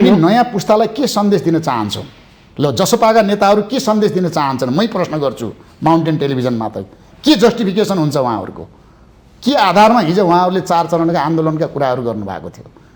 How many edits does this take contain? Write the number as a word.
zero